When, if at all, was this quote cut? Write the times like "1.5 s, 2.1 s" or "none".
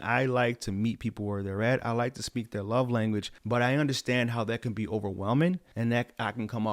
3.3 s, 5.7 s

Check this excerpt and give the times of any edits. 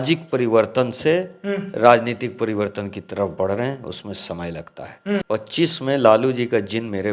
5.2 s

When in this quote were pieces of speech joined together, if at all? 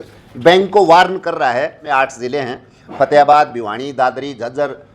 1.8 s

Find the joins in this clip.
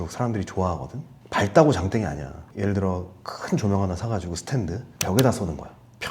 2.3 s

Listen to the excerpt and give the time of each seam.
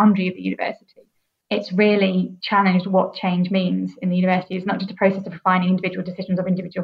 1.4 s, 2.4 s

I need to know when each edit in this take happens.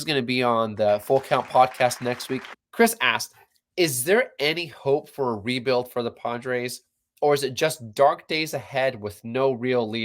2.5 s

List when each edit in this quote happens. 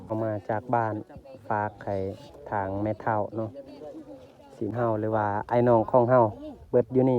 4.7 s

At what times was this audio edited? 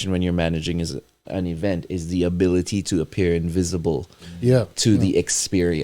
1.2 s

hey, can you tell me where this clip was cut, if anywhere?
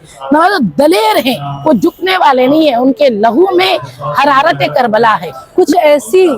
5.3 s

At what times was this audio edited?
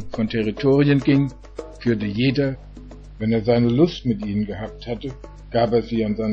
none

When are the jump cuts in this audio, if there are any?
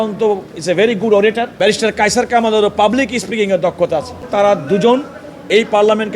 1.3 s, 4.3 s

